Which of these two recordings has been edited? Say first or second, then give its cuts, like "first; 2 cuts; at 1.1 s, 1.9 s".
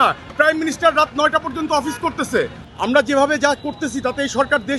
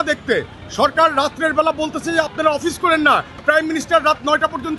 first; 1 cut; at 2.6 s